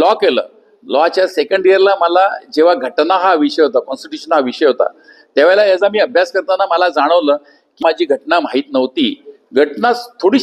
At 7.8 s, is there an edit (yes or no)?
yes